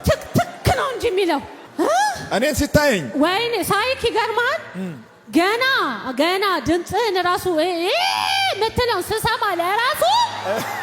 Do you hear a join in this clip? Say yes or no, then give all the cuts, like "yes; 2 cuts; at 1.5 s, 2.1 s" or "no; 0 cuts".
yes; 1 cut; at 1.6 s